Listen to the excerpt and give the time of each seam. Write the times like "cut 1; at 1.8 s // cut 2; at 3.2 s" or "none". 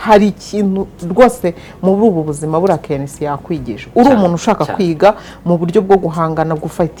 none